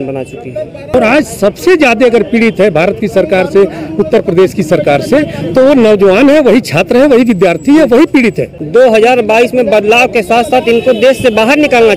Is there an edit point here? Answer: yes; 2 cuts; at 0.9 s, 8.5 s

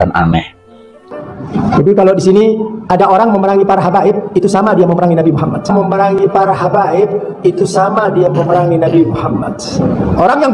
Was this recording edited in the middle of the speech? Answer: yes; 1 cut; at 1.1 s

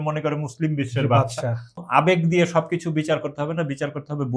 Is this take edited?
yes; 1 cut; at 1.8 s

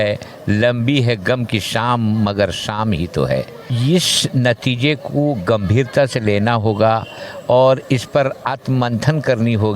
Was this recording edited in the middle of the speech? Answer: yes; 1 cut; at 3.6 s

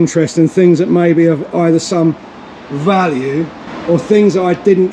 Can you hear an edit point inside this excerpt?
yes; 1 cut; at 3.7 s

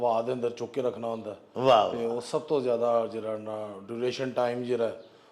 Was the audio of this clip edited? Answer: no; 0 cuts

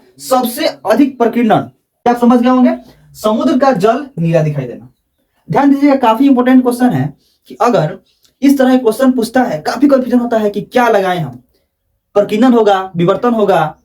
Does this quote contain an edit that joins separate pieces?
yes; 1 cut; at 1.9 s

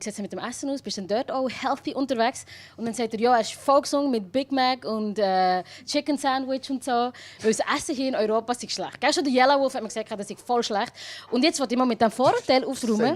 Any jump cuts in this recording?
yes; 1 cut; at 2.8 s

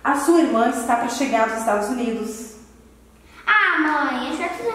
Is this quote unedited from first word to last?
yes; 0 cuts

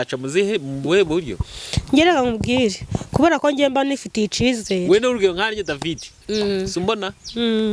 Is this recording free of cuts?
yes; 0 cuts

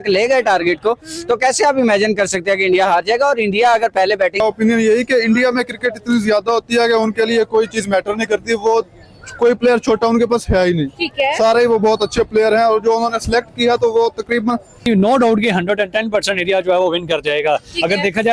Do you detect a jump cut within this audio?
yes; 2 cuts; at 4.4 s, 14.8 s

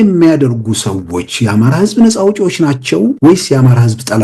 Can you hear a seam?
yes; 1 cut; at 3.2 s

